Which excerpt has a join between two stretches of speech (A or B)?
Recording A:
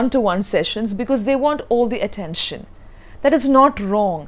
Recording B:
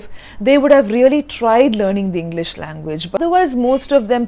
B